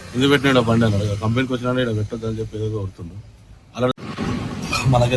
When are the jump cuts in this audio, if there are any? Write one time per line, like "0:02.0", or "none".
0:03.9